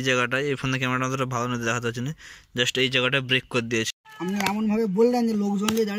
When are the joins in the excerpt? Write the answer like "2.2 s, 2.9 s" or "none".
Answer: 3.9 s